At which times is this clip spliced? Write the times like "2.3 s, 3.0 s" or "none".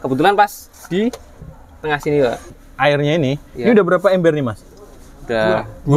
2.5 s